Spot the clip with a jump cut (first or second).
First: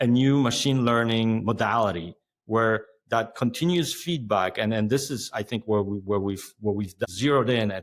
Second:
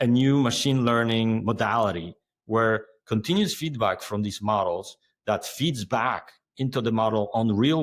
second